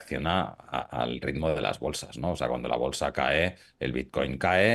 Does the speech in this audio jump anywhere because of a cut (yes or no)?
no